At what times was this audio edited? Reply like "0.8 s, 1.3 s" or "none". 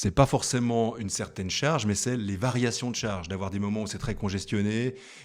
none

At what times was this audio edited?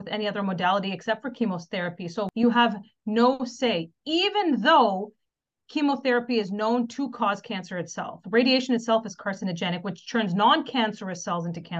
2.3 s

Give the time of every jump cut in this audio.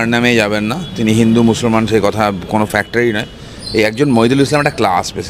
none

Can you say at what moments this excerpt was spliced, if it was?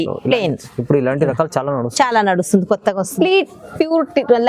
3.1 s

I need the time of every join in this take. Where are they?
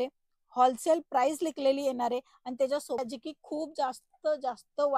3.0 s

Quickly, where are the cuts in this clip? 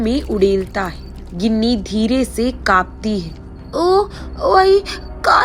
none

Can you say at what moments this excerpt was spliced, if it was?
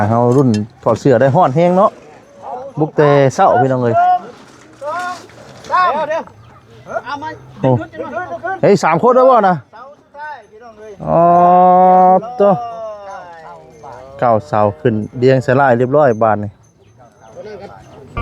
none

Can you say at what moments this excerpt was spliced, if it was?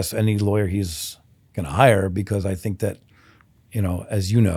none

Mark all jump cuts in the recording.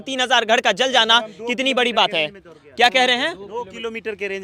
none

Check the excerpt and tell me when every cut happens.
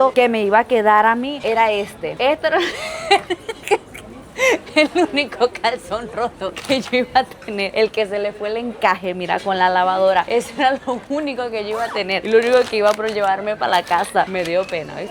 none

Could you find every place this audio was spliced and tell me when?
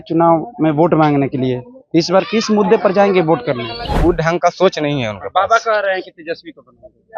3.9 s

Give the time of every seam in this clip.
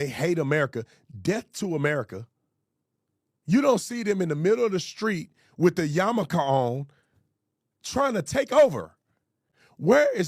none

